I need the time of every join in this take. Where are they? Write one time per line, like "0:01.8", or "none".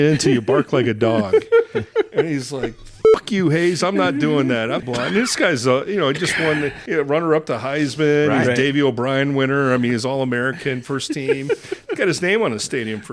0:04.8
0:06.8